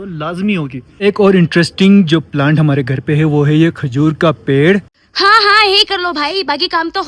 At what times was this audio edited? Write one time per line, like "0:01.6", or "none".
0:01.0
0:05.0